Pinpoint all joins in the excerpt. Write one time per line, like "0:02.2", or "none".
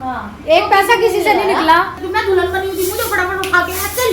0:02.0